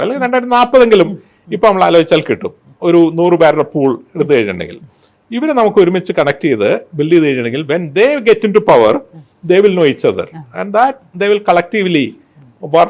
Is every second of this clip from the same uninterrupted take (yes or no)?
yes